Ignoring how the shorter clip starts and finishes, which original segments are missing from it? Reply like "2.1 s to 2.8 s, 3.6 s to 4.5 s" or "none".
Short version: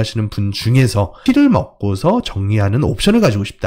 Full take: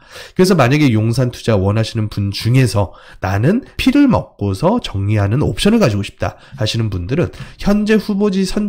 2.9 s to 3.7 s